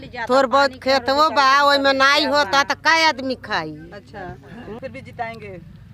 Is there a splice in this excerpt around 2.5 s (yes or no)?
no